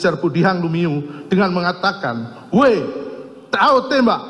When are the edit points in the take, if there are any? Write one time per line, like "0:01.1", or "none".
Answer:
none